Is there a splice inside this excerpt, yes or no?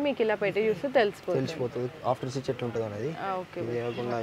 no